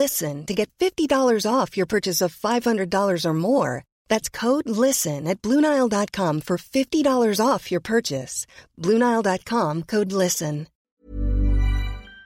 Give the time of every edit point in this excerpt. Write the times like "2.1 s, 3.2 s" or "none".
10.8 s